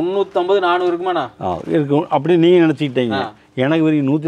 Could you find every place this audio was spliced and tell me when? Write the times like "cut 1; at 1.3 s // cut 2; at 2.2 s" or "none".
none